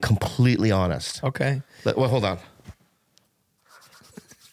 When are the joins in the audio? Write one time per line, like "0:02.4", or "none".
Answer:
none